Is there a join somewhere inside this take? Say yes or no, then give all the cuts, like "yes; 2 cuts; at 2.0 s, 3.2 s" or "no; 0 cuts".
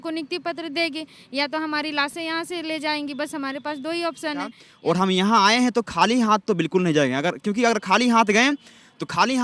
yes; 1 cut; at 4.7 s